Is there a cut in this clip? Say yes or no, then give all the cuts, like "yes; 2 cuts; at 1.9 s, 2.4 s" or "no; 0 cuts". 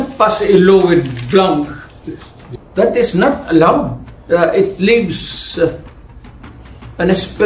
no; 0 cuts